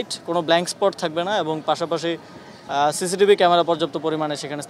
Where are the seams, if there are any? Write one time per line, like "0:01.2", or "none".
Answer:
none